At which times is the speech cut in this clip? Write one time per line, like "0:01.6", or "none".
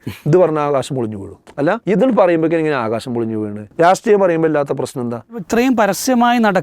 0:01.6
0:03.6
0:05.4

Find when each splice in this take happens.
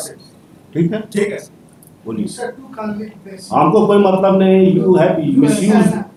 none

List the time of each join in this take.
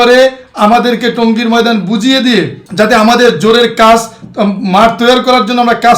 0:02.6

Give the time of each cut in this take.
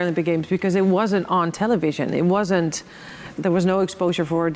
0:03.4

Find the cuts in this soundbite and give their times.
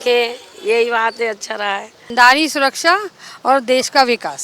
0:02.1

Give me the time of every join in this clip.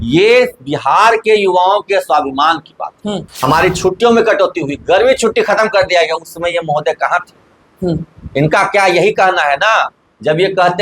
0:03.3

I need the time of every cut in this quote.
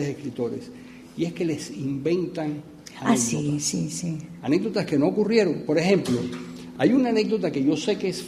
none

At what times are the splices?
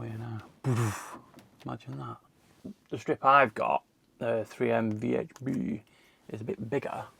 none

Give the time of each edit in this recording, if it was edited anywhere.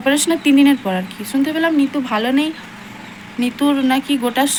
none

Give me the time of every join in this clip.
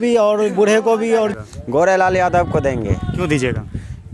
0:01.3

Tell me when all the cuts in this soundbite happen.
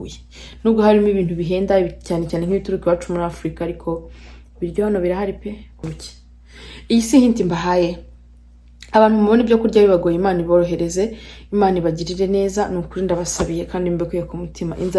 0:05.9

